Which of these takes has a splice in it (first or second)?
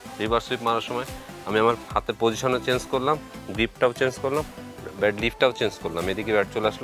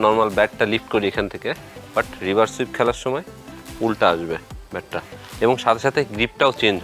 second